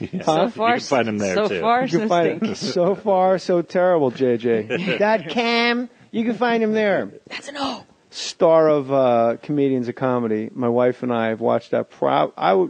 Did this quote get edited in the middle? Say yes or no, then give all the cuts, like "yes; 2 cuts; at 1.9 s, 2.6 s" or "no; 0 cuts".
no; 0 cuts